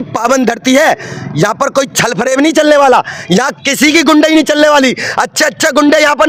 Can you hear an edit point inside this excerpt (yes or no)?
no